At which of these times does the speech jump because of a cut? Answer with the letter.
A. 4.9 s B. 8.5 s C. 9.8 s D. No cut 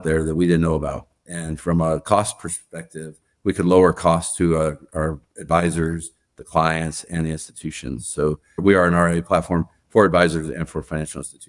B